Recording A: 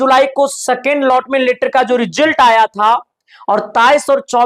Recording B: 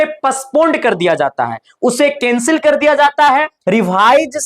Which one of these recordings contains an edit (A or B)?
B